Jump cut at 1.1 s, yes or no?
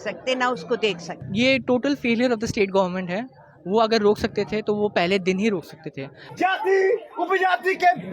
yes